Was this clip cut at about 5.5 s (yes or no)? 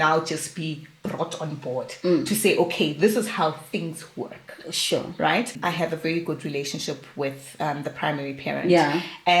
yes